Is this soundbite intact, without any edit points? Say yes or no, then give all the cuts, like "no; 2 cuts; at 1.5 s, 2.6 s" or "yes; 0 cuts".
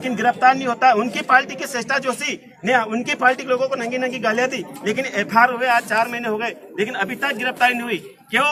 yes; 0 cuts